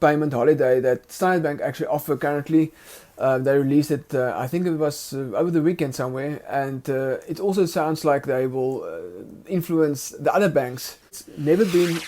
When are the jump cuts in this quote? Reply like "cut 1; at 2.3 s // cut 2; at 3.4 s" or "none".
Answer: cut 1; at 11.2 s